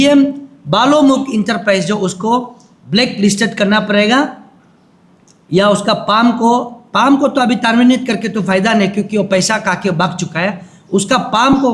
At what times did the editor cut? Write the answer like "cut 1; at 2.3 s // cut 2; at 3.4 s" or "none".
none